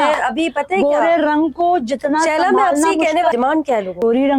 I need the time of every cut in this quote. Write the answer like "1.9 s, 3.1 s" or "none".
3.4 s